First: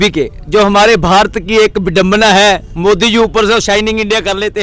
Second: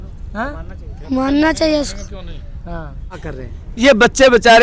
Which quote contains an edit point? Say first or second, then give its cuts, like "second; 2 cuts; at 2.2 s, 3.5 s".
second; 1 cut; at 3.3 s